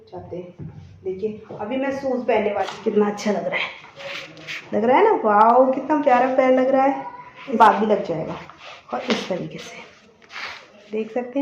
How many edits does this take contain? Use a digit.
2